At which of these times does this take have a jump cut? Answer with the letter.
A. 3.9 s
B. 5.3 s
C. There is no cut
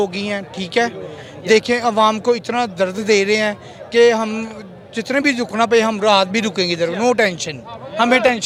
C